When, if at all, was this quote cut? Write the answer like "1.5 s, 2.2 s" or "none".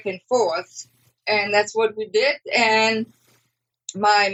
none

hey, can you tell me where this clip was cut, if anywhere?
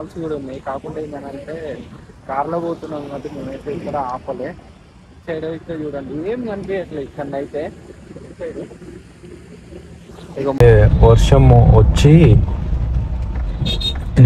10.6 s

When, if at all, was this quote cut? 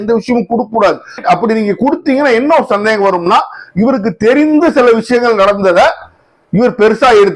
none

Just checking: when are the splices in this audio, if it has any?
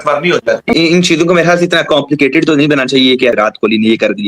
0.8 s, 3.3 s

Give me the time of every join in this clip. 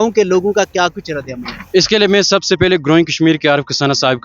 none

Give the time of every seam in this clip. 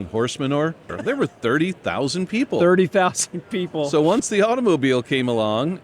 0.9 s, 4.2 s

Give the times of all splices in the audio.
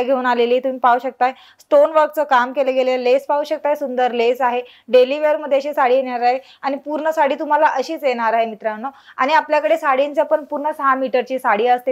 none

